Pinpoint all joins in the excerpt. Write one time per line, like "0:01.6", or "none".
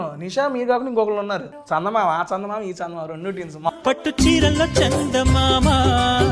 0:01.5
0:03.7